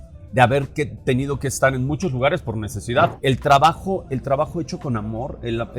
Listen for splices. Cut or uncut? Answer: cut